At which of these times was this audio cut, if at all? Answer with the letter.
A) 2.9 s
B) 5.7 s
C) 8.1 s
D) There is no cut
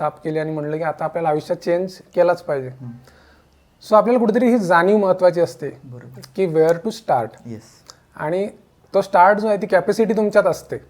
D